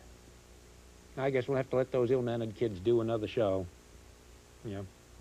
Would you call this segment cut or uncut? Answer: uncut